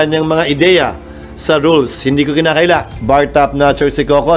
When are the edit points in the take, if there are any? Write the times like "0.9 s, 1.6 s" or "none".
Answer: none